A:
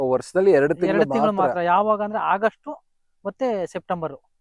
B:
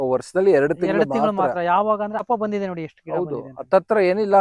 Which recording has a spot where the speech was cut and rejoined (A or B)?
B